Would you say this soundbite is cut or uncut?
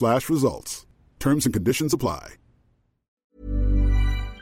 cut